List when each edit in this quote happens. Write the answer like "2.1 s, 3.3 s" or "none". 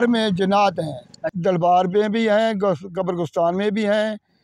1.3 s